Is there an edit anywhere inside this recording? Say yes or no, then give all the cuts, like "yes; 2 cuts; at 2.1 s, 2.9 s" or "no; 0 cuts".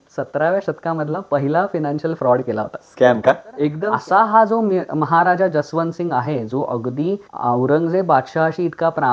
yes; 2 cuts; at 3.8 s, 7.3 s